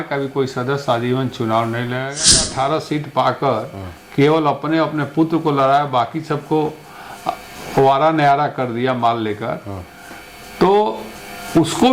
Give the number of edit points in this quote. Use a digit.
1